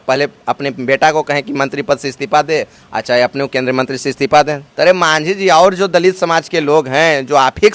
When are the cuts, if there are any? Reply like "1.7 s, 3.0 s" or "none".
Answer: 4.6 s